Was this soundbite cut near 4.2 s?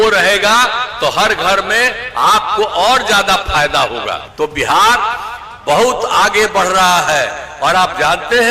yes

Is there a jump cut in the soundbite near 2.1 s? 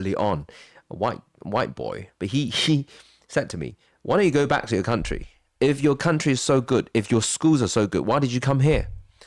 yes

